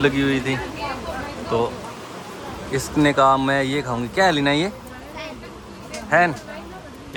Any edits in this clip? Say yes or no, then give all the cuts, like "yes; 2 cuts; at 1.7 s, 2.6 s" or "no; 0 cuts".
no; 0 cuts